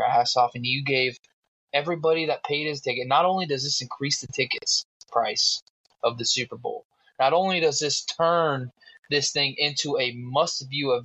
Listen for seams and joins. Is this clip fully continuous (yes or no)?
yes